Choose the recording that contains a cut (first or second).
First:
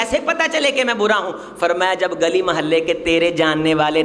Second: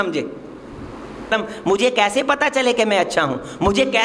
second